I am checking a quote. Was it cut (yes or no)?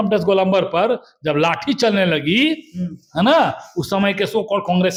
no